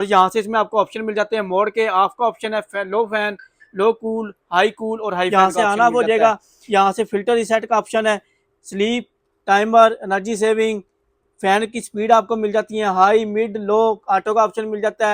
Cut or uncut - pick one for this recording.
cut